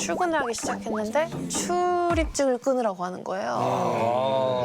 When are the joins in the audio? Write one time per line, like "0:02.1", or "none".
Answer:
0:01.4